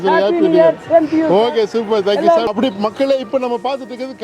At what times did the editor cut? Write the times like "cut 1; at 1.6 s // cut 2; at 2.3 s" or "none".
cut 1; at 2.5 s